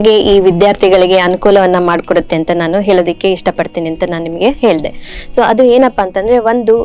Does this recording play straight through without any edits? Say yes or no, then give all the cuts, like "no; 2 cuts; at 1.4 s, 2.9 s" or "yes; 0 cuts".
yes; 0 cuts